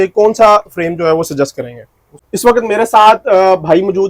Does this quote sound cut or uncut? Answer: cut